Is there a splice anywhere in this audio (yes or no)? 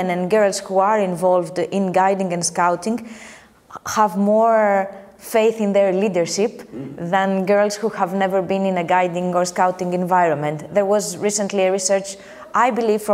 no